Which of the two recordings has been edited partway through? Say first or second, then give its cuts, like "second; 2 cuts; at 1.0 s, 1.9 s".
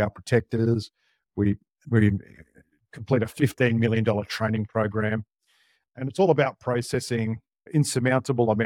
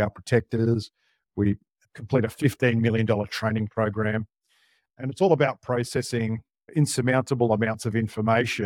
second; 1 cut; at 1.7 s